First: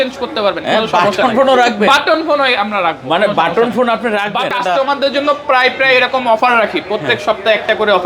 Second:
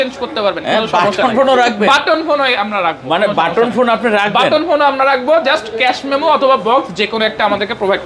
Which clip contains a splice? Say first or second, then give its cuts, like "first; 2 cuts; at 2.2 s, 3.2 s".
first; 1 cut; at 4.5 s